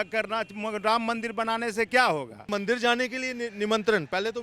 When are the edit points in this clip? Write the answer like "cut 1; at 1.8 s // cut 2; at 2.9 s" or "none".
cut 1; at 2.4 s